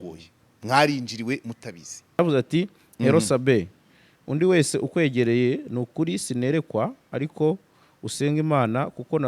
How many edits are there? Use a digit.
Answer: 1